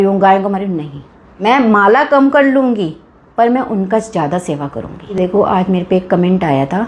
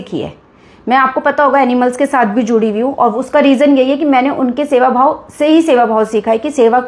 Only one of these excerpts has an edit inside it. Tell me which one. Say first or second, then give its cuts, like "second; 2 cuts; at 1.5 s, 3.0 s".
first; 2 cuts; at 1.4 s, 5.1 s